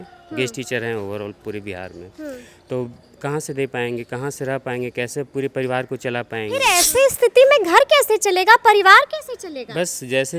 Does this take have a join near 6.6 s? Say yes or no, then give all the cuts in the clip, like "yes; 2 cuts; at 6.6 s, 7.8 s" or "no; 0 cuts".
yes; 1 cut; at 6.6 s